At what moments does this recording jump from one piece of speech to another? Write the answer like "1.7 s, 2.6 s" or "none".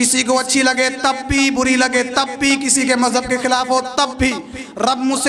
none